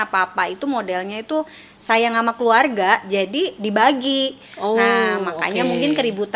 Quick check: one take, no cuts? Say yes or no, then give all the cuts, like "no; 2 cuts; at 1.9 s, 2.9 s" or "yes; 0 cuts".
yes; 0 cuts